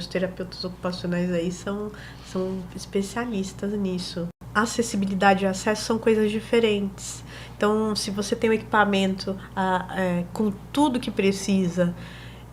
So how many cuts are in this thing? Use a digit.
1